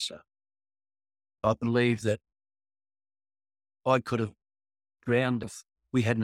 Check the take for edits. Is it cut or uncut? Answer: cut